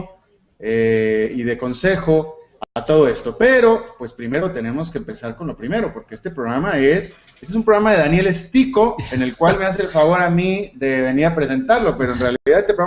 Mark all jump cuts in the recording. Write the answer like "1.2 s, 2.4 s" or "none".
7.0 s

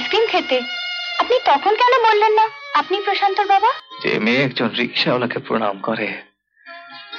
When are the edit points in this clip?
3.8 s

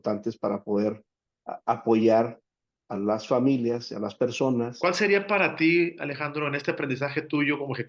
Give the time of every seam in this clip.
4.7 s

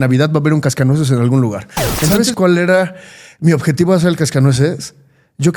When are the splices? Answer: 2.2 s

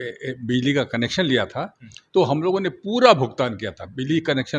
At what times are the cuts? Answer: none

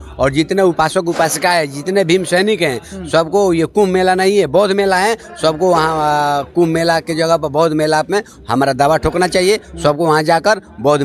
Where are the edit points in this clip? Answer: none

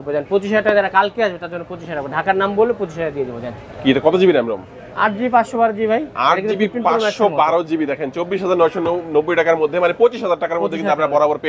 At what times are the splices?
none

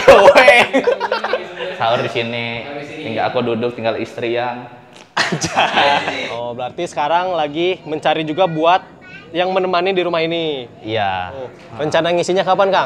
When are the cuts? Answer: 1.6 s, 6.2 s, 11.6 s

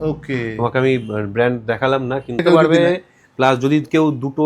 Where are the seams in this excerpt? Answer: 2.4 s

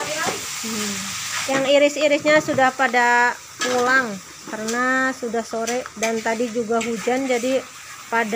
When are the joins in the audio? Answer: 1.3 s

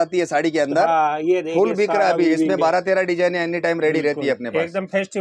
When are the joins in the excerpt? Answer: none

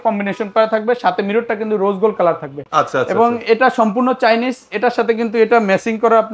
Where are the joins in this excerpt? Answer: none

